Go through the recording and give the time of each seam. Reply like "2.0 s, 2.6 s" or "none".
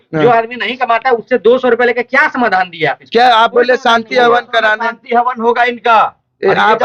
none